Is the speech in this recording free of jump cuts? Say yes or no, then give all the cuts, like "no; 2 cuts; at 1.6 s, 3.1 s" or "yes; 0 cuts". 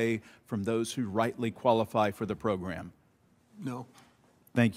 no; 1 cut; at 1.2 s